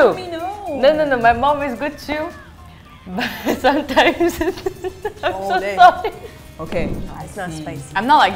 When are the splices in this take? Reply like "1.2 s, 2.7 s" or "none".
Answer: 6.9 s